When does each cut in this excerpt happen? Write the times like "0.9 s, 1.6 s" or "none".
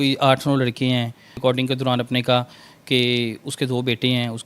1.4 s